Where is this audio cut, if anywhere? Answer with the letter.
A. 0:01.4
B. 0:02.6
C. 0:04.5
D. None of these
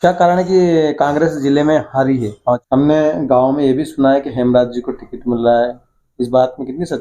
B